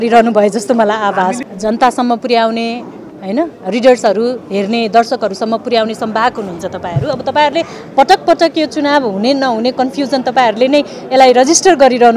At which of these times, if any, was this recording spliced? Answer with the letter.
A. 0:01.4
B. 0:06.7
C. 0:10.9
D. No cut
A